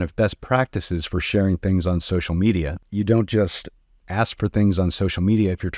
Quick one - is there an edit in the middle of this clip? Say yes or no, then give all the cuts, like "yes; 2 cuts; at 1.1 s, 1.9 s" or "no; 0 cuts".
yes; 1 cut; at 2.8 s